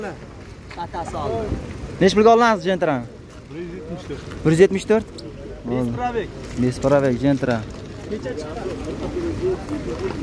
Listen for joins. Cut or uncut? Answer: uncut